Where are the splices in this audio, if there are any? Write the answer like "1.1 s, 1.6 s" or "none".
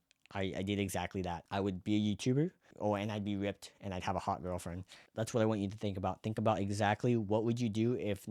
2.7 s, 5.0 s